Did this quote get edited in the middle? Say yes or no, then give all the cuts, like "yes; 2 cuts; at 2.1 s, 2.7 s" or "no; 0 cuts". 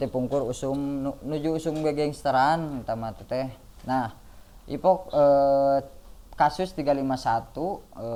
no; 0 cuts